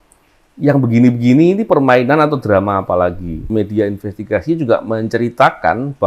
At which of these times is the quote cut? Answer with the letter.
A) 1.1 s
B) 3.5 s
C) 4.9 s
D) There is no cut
B